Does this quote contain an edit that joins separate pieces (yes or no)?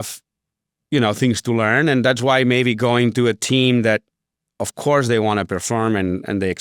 no